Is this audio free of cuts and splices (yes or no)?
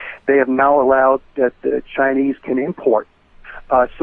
yes